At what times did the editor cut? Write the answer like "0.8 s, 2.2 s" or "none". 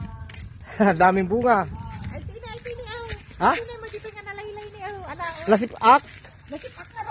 none